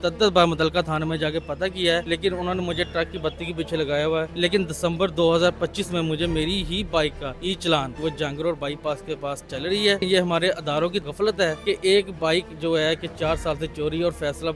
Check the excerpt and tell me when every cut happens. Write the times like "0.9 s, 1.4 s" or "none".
2.0 s, 4.3 s, 7.3 s, 8.0 s, 10.0 s, 11.2 s

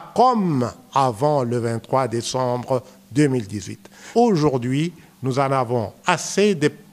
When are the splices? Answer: 4.0 s

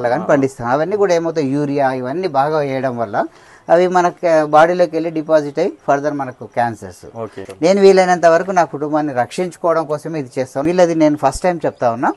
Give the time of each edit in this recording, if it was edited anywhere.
7.4 s, 10.6 s

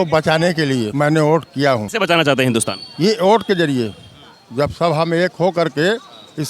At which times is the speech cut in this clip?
0.9 s, 1.9 s

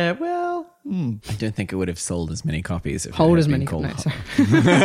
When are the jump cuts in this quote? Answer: 1.2 s

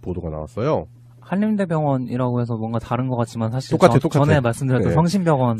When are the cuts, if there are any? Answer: 2.2 s

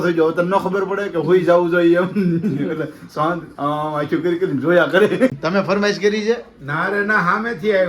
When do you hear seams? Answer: 5.3 s

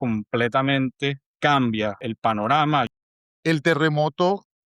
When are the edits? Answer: 1.2 s, 2.0 s, 2.9 s

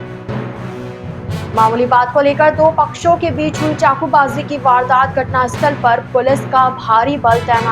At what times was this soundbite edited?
1.4 s

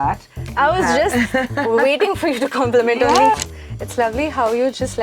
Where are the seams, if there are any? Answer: 3.4 s

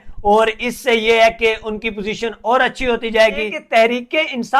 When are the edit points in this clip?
3.6 s

